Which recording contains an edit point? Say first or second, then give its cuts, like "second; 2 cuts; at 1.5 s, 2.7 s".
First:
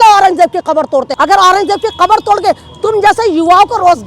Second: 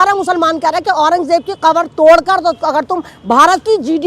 first; 1 cut; at 1.1 s